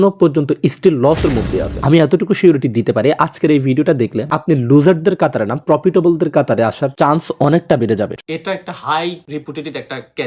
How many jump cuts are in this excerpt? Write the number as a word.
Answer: two